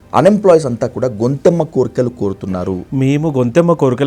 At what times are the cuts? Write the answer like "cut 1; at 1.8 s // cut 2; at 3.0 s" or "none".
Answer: cut 1; at 2.8 s